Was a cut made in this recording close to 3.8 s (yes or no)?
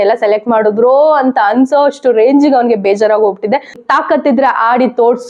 yes